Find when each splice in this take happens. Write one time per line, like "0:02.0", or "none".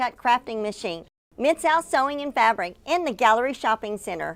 none